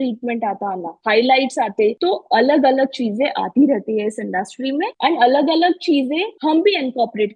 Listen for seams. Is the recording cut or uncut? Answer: cut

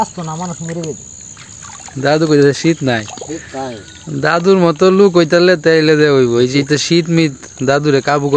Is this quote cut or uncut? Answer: cut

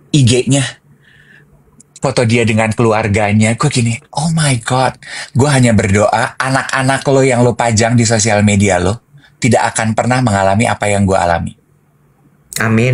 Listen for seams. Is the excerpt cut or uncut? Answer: uncut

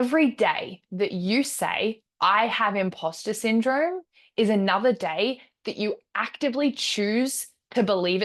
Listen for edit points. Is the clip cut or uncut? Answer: uncut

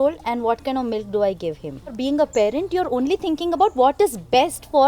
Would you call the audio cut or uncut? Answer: cut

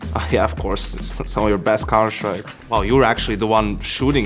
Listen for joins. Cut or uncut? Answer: cut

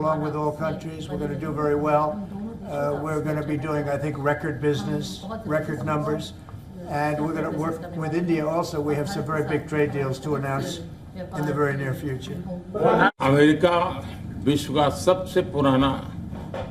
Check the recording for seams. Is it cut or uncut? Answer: cut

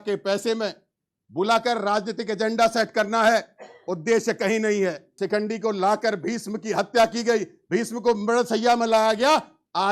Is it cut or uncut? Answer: cut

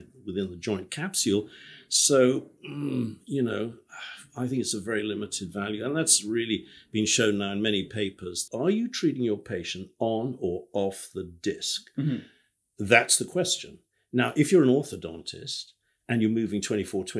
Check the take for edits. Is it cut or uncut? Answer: cut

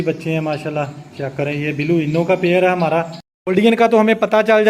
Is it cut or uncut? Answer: cut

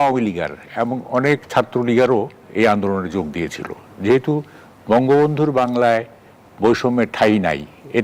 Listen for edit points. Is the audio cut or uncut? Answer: uncut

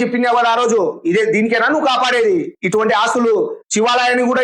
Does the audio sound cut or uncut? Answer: uncut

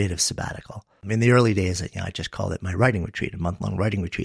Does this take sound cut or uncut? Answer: cut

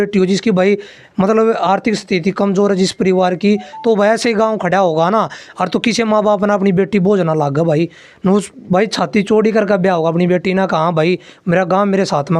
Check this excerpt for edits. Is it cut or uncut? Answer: uncut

